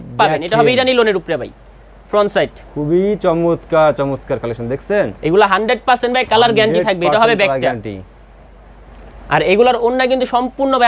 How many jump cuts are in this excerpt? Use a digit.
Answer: 0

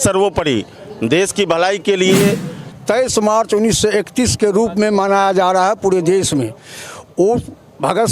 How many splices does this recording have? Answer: 1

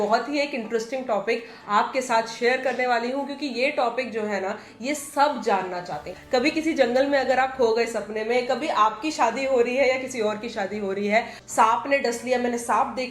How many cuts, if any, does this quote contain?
2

